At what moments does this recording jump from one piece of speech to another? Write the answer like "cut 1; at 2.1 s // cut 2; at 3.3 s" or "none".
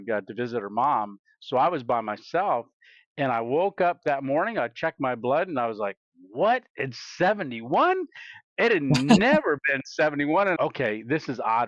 cut 1; at 10.6 s